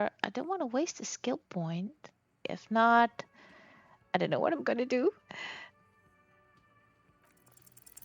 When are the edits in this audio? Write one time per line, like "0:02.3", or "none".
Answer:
0:02.4